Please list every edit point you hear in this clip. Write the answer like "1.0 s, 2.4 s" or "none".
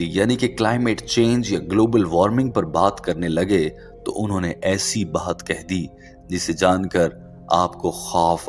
none